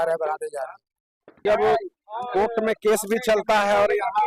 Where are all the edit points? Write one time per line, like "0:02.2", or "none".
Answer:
0:00.9